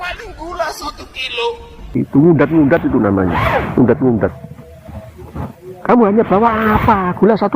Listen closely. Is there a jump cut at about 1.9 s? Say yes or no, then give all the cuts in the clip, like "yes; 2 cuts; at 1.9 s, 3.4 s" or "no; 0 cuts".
yes; 1 cut; at 1.9 s